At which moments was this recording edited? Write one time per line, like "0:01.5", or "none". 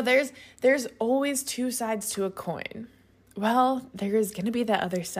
none